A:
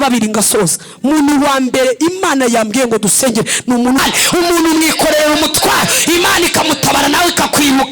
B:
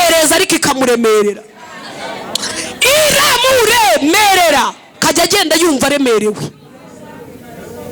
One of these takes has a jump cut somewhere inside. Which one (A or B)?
A